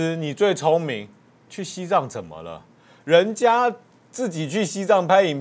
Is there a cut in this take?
no; 0 cuts

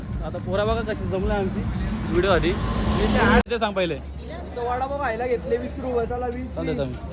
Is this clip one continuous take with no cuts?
no; 1 cut; at 3.4 s

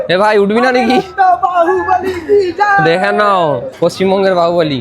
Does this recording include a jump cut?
no; 0 cuts

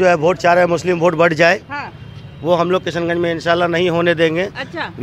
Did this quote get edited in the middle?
no; 0 cuts

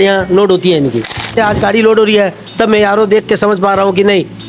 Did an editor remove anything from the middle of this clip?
yes; 1 cut; at 1.4 s

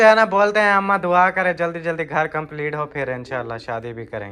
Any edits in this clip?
no; 0 cuts

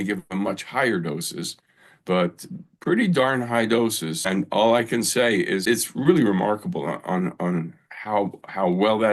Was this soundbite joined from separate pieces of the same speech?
yes; 2 cuts; at 4.2 s, 5.6 s

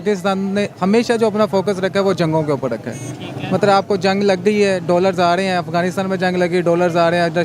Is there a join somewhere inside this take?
no; 0 cuts

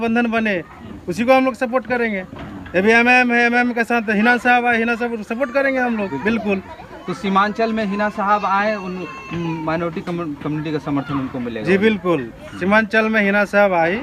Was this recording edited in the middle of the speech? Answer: no; 0 cuts

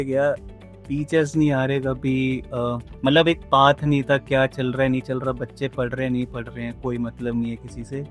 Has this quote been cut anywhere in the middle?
no; 0 cuts

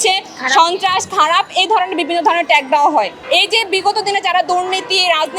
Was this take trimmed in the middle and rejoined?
yes; 1 cut; at 3.2 s

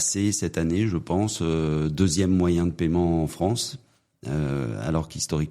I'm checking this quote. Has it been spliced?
no; 0 cuts

